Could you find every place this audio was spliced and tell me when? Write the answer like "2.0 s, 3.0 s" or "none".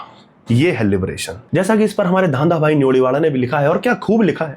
1.4 s